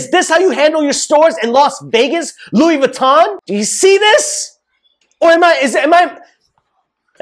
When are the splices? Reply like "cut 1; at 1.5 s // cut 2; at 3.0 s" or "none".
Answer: cut 1; at 3.4 s